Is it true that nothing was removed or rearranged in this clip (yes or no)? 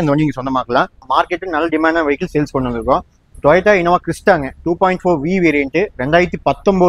no